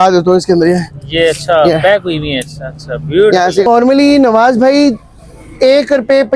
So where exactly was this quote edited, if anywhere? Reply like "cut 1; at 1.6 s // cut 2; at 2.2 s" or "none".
cut 1; at 3.7 s